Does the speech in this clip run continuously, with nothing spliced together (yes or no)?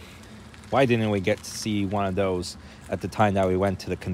yes